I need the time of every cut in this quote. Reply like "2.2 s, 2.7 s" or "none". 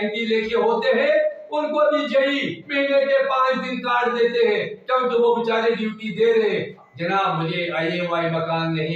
6.9 s